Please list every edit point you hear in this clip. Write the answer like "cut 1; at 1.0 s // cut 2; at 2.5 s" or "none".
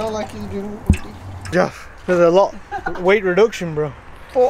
cut 1; at 1.5 s